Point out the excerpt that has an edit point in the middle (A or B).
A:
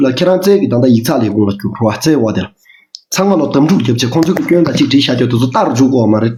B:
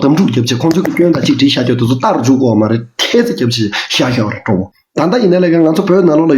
B